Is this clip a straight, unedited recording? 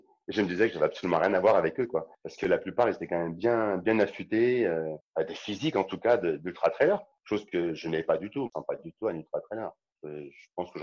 no; 4 cuts; at 5.0 s, 7.1 s, 8.5 s, 9.9 s

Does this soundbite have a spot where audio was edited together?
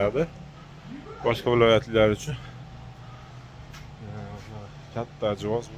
no; 0 cuts

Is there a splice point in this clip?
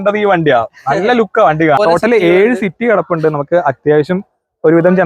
yes; 1 cut; at 1.8 s

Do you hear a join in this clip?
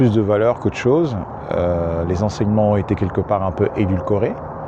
no; 0 cuts

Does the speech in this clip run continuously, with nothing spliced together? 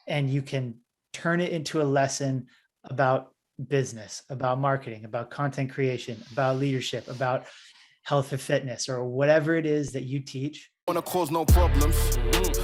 no; 1 cut; at 10.9 s

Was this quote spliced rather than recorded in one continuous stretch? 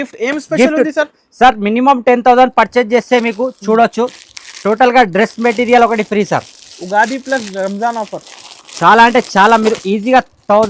no; 0 cuts

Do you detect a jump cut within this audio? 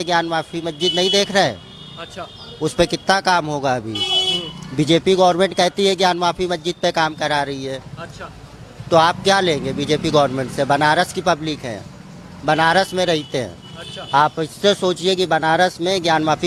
no; 0 cuts

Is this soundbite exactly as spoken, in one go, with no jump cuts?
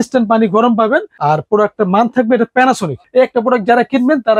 no; 1 cut; at 3.1 s

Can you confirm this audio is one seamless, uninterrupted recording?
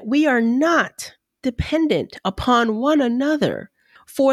yes; 0 cuts

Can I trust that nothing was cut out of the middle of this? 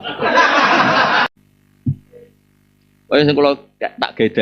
no; 1 cut; at 1.3 s

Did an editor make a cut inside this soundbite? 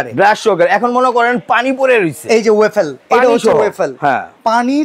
no; 0 cuts

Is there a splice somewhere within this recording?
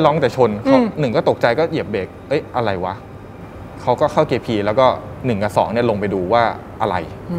no; 0 cuts

